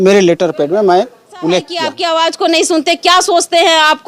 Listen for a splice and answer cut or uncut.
cut